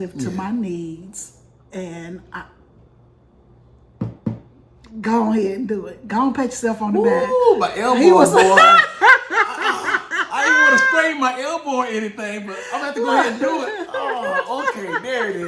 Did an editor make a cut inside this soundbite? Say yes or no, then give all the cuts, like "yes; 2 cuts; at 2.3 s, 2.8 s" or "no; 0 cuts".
no; 0 cuts